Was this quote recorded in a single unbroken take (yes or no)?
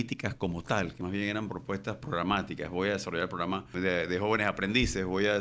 no